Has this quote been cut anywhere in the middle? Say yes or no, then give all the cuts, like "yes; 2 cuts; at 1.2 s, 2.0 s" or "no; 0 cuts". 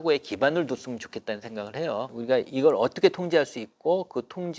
yes; 1 cut; at 2.1 s